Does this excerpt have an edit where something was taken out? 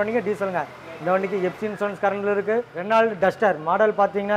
yes; 1 cut; at 2.8 s

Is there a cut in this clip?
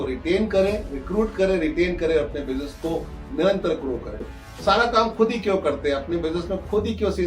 yes; 1 cut; at 4.3 s

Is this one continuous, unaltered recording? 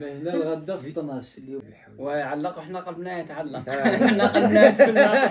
no; 1 cut; at 1.6 s

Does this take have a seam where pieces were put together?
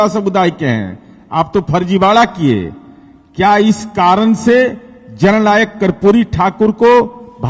no; 0 cuts

